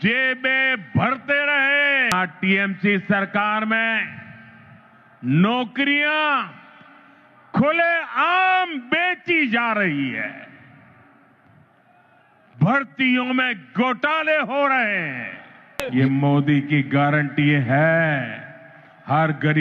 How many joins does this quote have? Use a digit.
2